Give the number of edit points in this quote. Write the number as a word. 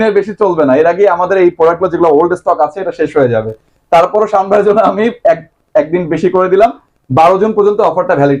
zero